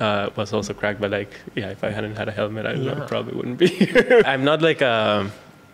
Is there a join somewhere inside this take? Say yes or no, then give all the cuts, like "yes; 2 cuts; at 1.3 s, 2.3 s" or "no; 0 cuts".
yes; 1 cut; at 4.2 s